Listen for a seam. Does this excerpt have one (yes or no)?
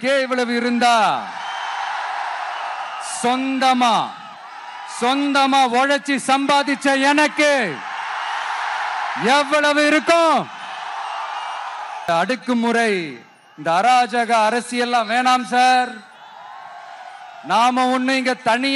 yes